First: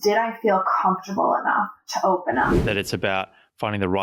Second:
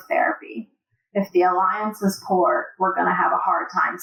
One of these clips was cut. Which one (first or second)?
first